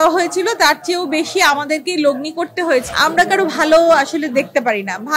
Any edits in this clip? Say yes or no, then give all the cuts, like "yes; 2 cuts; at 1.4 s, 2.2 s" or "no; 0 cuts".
yes; 1 cut; at 2.9 s